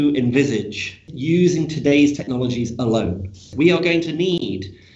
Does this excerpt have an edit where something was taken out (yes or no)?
yes